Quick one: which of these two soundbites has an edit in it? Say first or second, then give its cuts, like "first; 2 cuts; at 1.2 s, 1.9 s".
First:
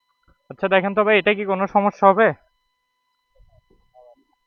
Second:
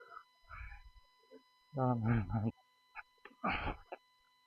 second; 1 cut; at 2.5 s